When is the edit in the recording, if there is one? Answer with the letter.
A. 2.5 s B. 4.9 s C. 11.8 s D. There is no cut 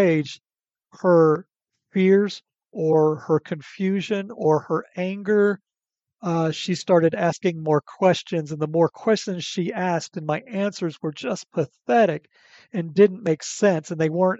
D